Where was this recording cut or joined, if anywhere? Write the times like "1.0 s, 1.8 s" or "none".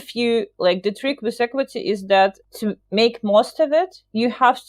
2.4 s